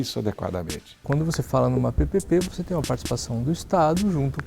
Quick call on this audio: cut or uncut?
cut